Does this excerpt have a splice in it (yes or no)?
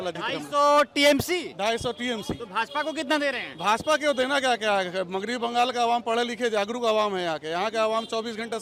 no